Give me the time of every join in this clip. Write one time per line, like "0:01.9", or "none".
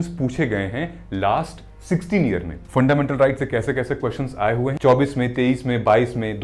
0:02.5
0:04.8